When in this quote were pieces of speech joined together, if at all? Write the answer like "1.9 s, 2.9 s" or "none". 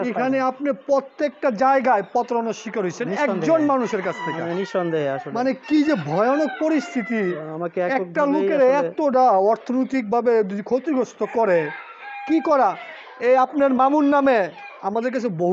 none